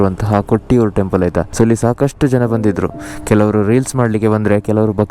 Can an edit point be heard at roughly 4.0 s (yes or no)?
no